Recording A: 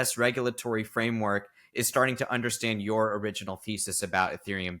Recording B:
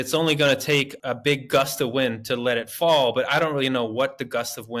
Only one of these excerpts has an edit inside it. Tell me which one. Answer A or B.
B